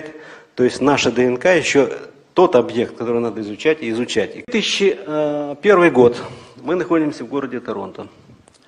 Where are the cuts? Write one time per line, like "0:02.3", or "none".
0:04.5